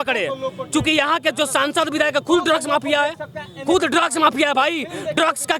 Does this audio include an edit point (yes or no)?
no